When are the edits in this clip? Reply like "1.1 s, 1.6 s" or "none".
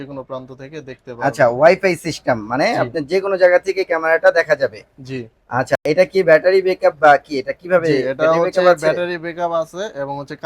none